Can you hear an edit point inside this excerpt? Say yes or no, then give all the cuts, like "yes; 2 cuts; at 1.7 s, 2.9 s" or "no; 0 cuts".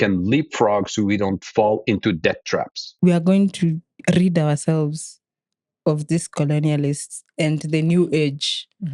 yes; 1 cut; at 2.8 s